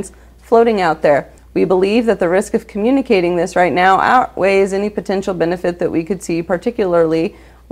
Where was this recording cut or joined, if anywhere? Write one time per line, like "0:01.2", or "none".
0:01.4